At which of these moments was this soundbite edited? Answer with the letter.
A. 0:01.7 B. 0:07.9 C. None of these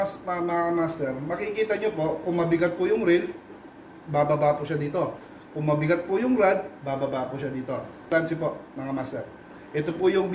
B